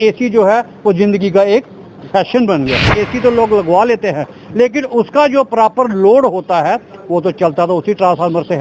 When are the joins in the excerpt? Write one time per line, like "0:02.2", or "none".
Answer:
0:02.9